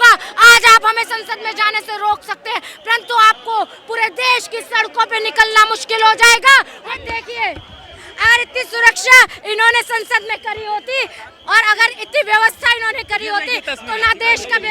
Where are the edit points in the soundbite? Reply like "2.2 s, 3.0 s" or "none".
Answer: 6.8 s